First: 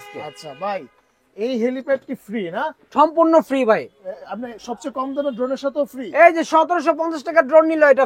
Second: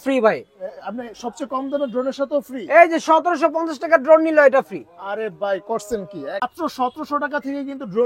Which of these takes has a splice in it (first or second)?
second